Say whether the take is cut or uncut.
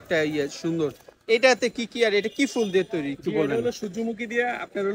uncut